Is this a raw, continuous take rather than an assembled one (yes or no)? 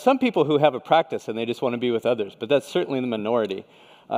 yes